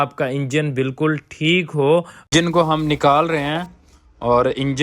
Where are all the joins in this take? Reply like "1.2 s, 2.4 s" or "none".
2.3 s